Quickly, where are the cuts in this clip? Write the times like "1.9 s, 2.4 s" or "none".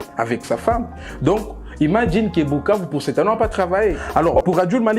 4.0 s